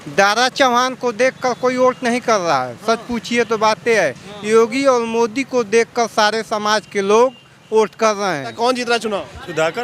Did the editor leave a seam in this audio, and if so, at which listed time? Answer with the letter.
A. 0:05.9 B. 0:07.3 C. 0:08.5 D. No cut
C